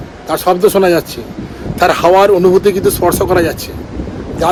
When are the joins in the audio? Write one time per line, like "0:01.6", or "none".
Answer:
none